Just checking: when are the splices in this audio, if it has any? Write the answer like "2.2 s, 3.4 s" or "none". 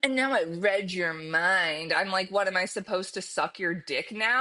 none